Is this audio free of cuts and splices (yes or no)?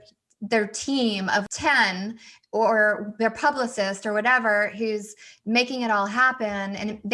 no